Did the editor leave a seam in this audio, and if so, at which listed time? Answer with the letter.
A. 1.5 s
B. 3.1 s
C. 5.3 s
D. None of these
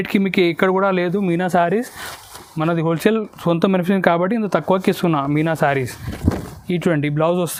D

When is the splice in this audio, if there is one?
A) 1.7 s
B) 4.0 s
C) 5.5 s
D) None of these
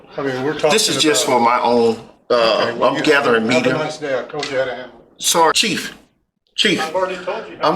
C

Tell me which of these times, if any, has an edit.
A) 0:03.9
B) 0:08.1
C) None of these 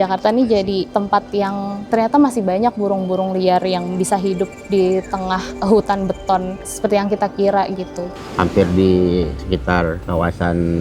B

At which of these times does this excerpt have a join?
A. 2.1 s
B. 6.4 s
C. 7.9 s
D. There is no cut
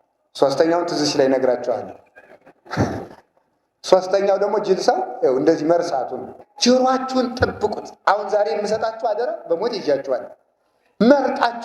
B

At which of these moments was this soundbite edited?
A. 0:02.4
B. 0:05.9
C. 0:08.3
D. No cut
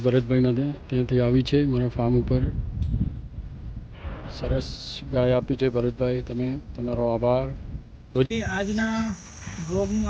C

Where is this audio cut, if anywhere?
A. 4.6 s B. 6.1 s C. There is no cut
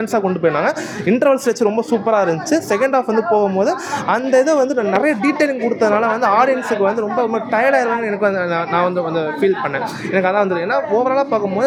C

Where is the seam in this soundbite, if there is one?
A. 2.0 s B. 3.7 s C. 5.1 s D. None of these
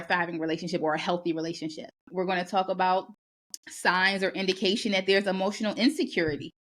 A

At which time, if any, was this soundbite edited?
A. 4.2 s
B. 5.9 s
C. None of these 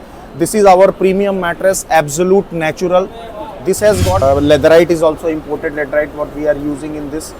A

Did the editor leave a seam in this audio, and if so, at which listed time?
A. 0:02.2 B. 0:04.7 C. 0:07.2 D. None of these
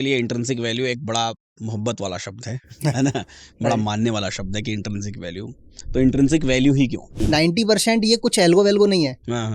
C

